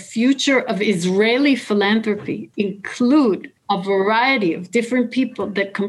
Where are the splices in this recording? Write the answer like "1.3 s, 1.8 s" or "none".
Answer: 2.4 s, 3.5 s